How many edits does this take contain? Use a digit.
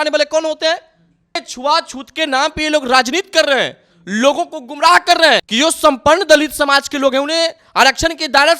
2